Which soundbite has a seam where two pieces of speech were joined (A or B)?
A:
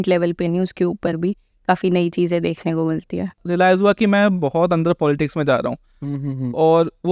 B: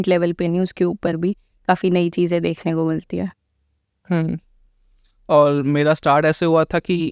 A